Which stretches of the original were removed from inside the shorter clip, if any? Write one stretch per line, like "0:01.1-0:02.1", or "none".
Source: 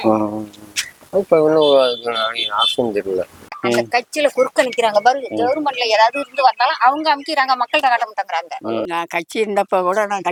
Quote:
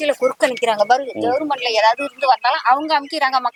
none